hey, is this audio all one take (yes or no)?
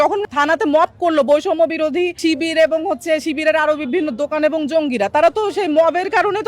no